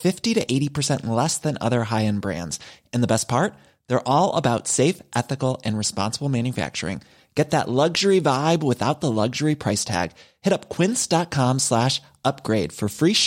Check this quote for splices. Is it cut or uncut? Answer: uncut